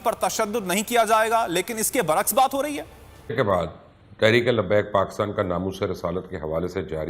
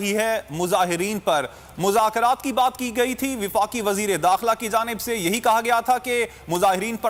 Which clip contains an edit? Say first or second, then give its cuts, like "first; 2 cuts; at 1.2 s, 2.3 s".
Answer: first; 1 cut; at 3.3 s